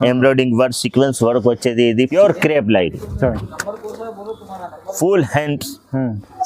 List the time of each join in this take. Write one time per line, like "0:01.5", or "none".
0:02.1